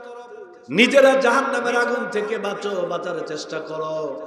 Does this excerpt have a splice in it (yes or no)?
no